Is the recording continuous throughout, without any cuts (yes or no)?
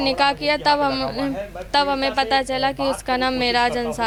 yes